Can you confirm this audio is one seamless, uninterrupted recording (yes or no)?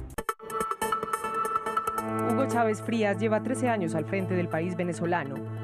no